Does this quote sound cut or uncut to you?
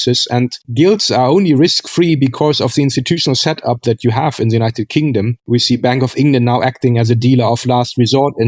uncut